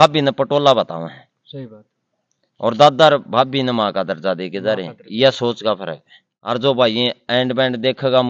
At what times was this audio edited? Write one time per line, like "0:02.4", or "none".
0:06.3